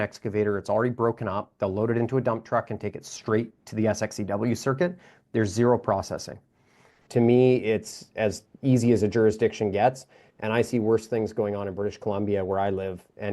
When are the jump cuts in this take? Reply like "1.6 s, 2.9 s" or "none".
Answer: 7.0 s